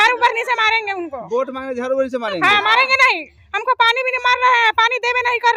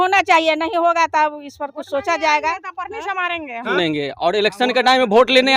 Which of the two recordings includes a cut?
second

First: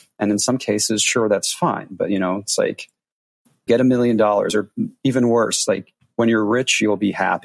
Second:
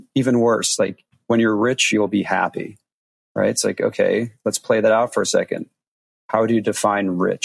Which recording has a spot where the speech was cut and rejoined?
first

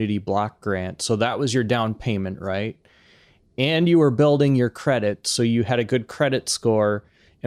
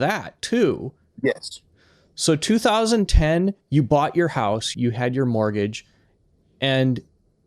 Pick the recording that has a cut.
second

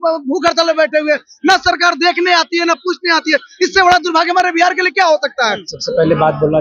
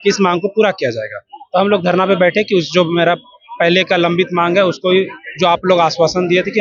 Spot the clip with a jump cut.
first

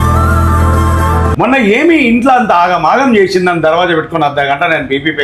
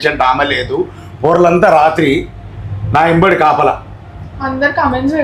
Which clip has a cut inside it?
first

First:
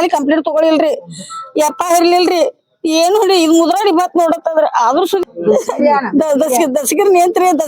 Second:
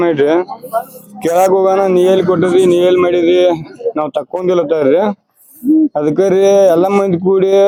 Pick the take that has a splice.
first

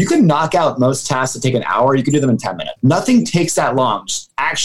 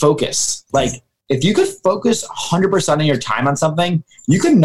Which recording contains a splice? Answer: first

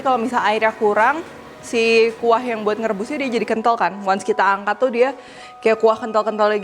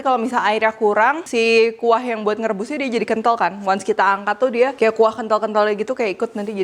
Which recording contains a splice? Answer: second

